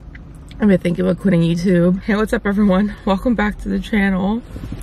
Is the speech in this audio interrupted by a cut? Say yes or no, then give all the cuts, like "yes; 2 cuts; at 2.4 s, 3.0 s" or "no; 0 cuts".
yes; 1 cut; at 2.0 s